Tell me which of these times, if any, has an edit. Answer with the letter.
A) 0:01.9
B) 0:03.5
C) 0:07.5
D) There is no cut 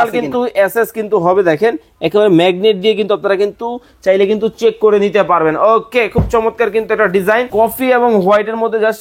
C